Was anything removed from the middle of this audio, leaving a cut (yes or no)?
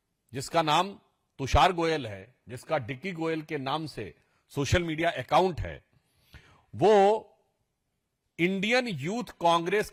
no